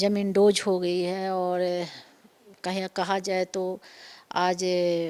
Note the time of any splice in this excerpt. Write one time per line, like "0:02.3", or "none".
none